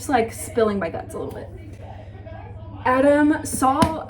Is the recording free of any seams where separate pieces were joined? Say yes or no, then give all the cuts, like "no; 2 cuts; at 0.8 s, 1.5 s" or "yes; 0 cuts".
yes; 0 cuts